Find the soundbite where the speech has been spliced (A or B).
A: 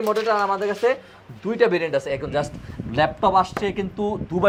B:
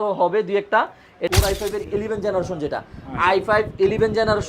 B